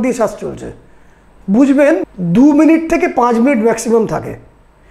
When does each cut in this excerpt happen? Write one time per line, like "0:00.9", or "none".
0:02.1

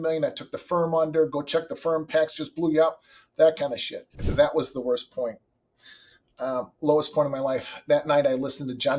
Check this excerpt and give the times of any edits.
0:04.2

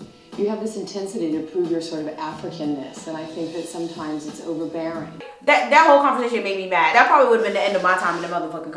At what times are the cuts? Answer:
0:05.3
0:06.9

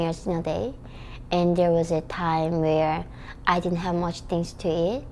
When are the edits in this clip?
none

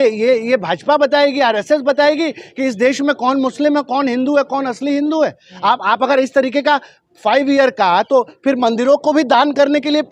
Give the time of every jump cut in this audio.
none

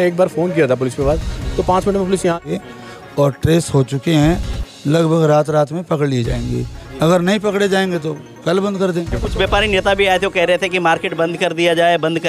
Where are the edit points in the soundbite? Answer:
0:02.5
0:09.1

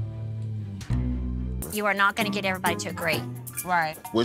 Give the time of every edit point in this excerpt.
none

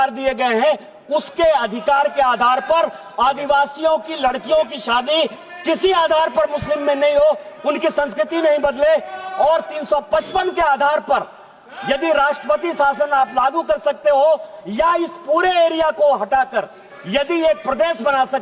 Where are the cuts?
none

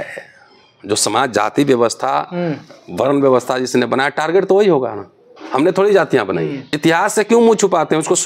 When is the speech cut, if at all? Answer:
0:06.7

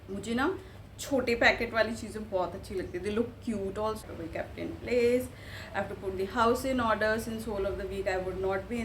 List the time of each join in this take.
0:04.0

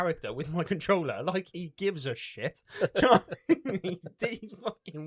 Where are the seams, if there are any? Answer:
none

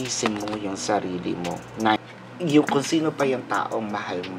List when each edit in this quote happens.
0:02.0

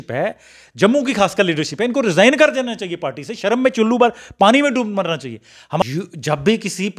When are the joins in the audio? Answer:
0:05.8

